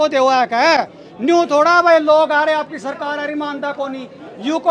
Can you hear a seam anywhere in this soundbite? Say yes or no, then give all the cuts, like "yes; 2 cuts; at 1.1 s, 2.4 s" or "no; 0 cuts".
no; 0 cuts